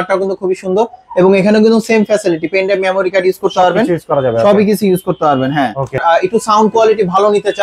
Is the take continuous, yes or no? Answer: no